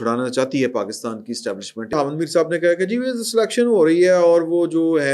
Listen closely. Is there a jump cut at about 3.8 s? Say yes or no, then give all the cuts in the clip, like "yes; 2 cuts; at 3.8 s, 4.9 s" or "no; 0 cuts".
no; 1 cut; at 1.9 s